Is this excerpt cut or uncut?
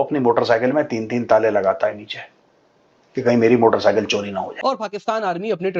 cut